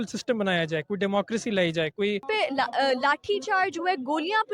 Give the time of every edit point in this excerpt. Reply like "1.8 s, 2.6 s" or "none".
2.2 s